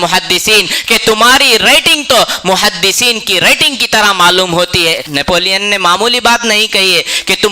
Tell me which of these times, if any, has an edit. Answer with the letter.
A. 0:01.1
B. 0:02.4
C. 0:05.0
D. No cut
C